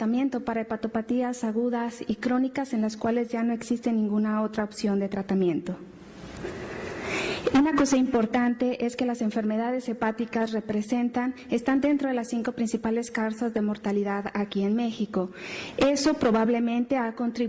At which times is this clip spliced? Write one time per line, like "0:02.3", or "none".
0:14.0